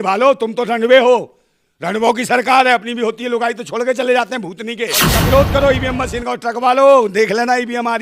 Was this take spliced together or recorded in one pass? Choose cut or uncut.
cut